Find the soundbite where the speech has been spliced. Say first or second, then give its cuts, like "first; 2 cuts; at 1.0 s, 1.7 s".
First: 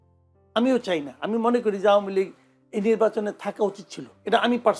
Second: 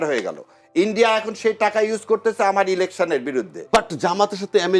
second; 1 cut; at 3.6 s